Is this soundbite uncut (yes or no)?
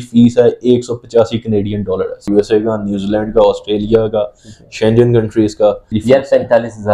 no